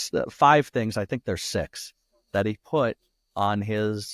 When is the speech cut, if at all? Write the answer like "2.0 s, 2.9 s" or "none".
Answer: none

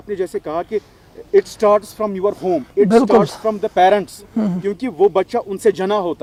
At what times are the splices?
none

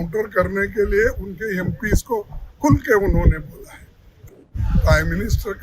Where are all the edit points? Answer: 4.2 s

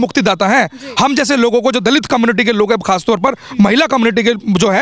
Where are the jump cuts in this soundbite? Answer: none

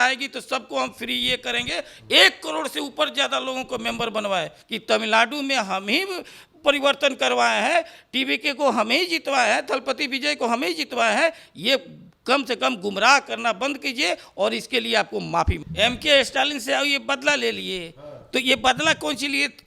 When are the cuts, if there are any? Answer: 4.6 s, 15.6 s

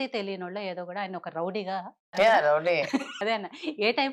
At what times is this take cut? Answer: 2.1 s, 3.1 s

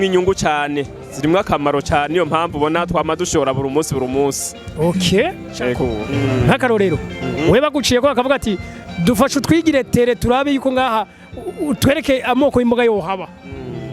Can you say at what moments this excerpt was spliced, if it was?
6.0 s

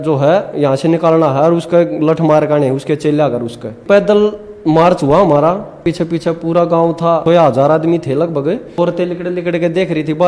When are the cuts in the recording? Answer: 3.8 s, 5.8 s, 7.2 s, 8.8 s

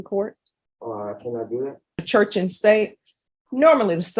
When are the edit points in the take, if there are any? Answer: 2.0 s

